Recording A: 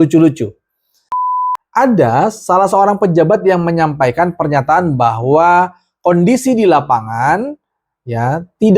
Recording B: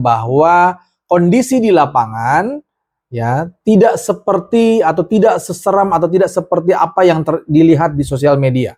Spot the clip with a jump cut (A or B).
A